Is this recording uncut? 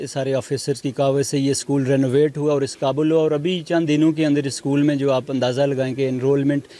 yes; 0 cuts

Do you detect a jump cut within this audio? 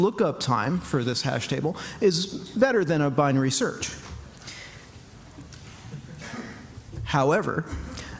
yes; 1 cut; at 4.0 s

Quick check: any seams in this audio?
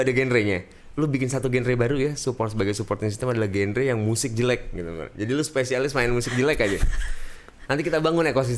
no; 0 cuts

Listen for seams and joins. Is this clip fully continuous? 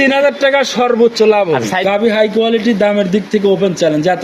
no; 1 cut; at 1.9 s

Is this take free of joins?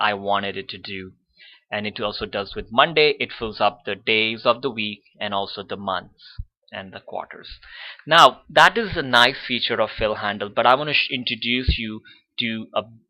yes; 0 cuts

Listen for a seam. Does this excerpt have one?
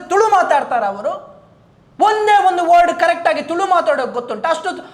no; 0 cuts

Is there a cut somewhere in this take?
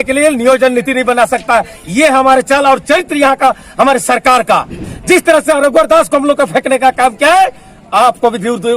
yes; 1 cut; at 4.9 s

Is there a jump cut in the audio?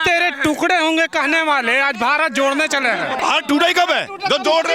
yes; 1 cut; at 3.2 s

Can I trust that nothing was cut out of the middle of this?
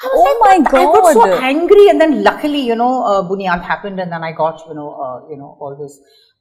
yes; 0 cuts

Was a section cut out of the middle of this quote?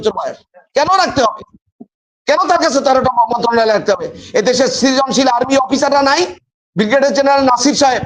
no; 0 cuts

